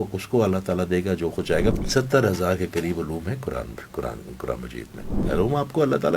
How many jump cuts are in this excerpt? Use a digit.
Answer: 2